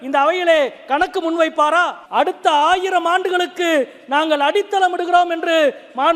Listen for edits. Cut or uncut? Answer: cut